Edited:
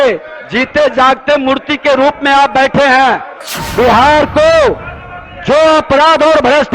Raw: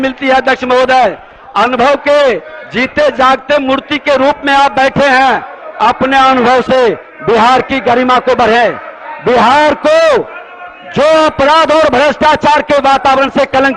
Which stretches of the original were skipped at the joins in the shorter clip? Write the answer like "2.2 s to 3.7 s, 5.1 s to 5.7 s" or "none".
5.6 s to 8.9 s